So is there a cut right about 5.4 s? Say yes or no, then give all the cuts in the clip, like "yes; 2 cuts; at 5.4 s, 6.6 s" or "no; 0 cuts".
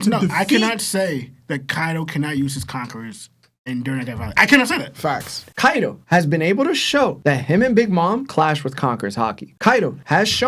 yes; 1 cut; at 5.4 s